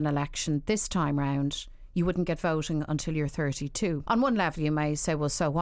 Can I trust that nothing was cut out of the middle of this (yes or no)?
no